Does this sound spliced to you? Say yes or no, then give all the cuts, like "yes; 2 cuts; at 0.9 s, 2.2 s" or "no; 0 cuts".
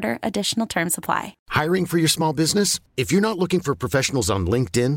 yes; 1 cut; at 1.4 s